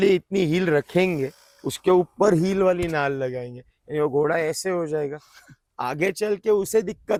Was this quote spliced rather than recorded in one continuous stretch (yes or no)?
no